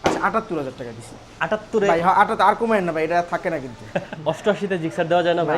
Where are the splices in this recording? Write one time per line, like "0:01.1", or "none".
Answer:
0:04.5